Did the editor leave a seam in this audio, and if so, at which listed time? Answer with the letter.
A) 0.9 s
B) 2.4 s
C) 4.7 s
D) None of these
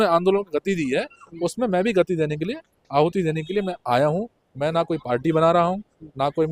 D